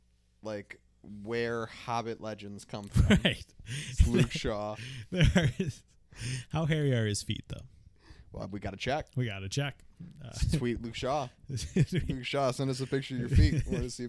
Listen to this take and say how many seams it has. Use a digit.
0